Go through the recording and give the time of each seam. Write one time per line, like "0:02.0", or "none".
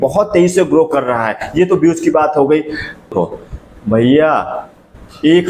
0:03.1